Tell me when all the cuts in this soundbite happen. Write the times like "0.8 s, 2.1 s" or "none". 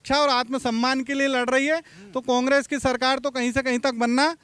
none